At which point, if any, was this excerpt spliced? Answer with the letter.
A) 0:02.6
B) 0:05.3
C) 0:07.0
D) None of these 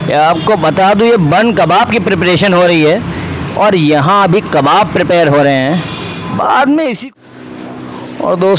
C